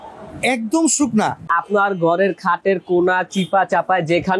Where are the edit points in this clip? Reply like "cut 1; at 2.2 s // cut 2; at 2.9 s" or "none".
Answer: cut 1; at 1.5 s